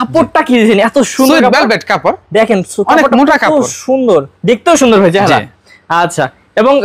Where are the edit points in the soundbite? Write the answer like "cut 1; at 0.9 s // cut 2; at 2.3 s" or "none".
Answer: none